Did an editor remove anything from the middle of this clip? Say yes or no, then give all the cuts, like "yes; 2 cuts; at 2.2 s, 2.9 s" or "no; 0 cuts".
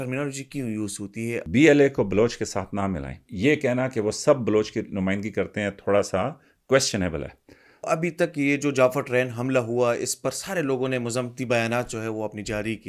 yes; 3 cuts; at 1.4 s, 3.2 s, 7.8 s